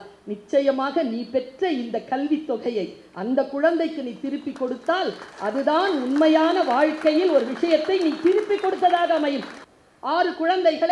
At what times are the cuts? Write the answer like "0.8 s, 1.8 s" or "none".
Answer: 9.5 s

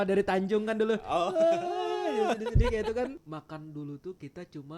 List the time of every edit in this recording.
3.2 s

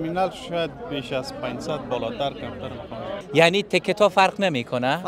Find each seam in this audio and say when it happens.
3.2 s

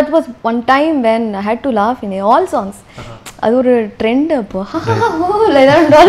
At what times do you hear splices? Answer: none

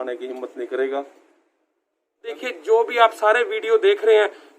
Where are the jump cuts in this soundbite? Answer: 2.3 s

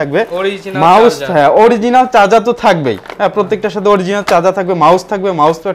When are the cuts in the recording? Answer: none

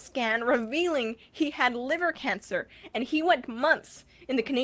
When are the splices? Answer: none

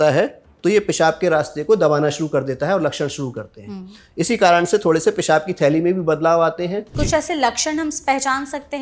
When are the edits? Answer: 6.9 s

